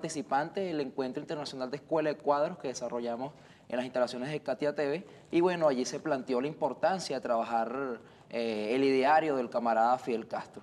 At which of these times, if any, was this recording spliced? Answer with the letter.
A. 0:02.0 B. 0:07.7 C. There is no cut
C